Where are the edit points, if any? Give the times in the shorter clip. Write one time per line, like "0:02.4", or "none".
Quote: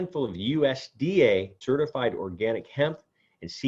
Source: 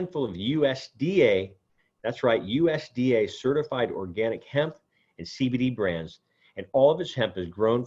0:01.6